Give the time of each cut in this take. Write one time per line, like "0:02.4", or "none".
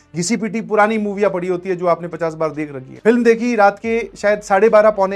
0:02.8